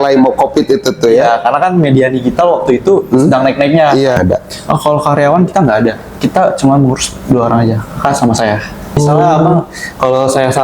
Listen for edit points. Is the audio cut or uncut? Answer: cut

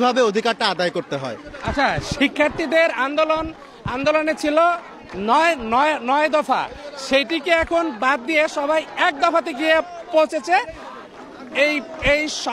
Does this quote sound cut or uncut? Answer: uncut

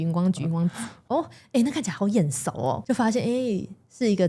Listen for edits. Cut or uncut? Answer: cut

